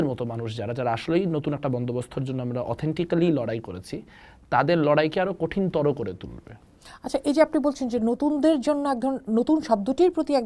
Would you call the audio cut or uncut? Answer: uncut